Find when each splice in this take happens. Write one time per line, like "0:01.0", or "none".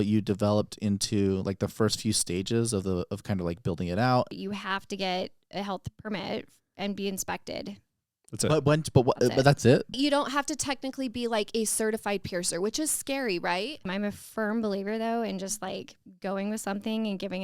0:04.3
0:10.0
0:13.9

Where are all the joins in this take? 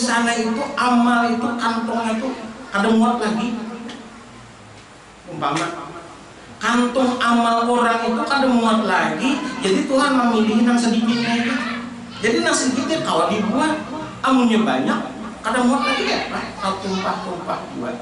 none

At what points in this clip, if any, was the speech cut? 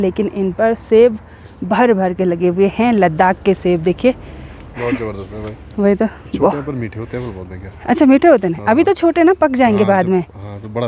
none

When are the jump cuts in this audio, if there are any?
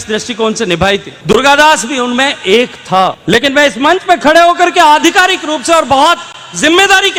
none

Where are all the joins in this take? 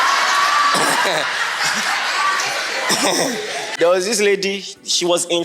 0:03.7

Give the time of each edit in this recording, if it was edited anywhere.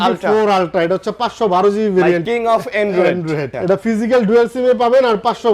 0:02.2
0:03.5

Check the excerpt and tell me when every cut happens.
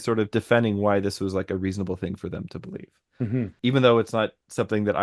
0:03.5

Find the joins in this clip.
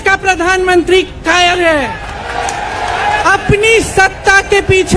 0:03.2

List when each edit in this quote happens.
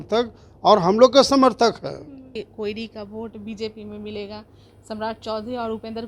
0:02.4

